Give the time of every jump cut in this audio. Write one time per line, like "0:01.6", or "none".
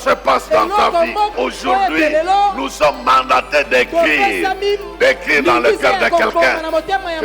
0:01.3

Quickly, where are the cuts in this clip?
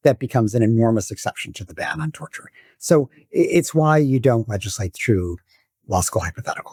none

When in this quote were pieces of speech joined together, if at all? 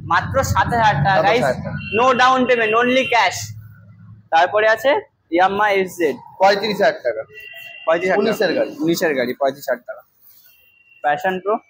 none

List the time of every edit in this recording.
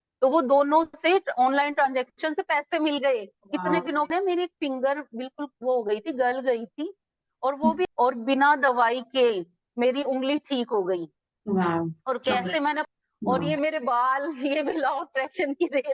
0:04.1
0:07.8
0:12.8

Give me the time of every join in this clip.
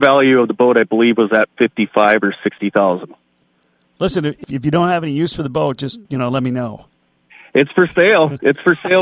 0:04.4

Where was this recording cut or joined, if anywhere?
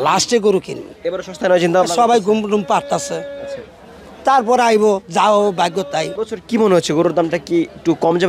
0:06.2

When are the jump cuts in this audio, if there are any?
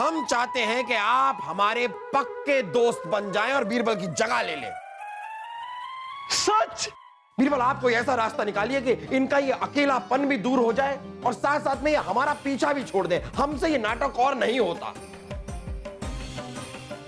0:07.0

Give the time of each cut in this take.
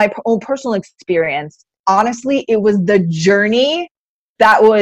0:01.8

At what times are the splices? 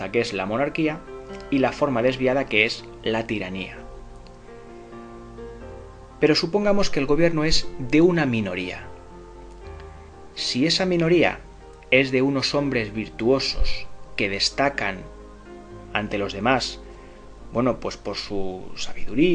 none

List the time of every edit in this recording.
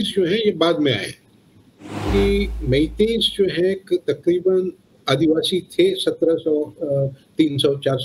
0:02.0

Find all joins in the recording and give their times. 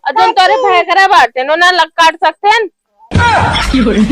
0:02.8

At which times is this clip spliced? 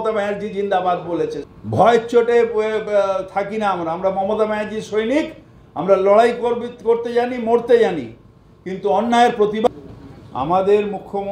0:01.5
0:09.7

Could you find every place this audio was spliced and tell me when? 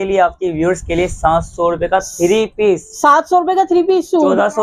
none

